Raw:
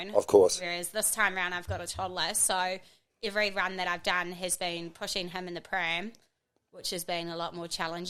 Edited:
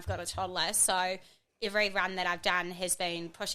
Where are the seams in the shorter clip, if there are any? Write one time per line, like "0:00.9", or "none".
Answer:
none